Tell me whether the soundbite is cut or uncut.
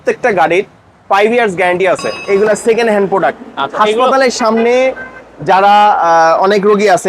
cut